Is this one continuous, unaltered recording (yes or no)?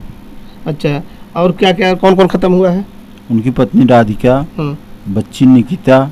yes